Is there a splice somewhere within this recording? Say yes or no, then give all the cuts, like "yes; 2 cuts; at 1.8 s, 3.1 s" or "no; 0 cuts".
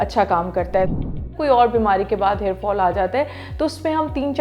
yes; 1 cut; at 1.0 s